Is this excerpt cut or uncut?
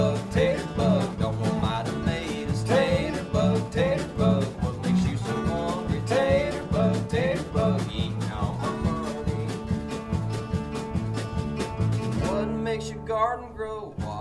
uncut